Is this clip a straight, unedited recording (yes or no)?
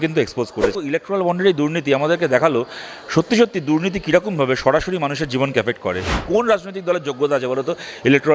no